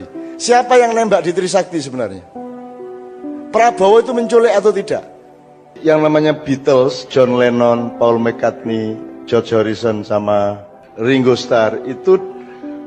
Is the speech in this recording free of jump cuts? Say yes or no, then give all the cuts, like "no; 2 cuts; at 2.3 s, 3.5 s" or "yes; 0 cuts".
no; 1 cut; at 5.8 s